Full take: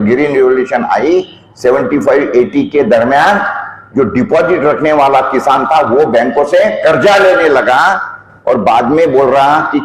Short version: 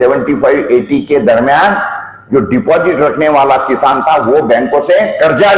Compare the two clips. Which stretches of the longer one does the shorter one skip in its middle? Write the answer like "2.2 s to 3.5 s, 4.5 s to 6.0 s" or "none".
none